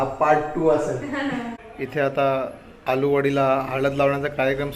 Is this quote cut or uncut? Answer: cut